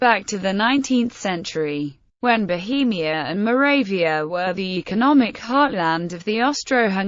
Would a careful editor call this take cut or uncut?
cut